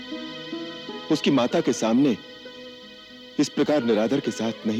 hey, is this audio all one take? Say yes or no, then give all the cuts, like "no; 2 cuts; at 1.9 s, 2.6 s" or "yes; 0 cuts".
yes; 0 cuts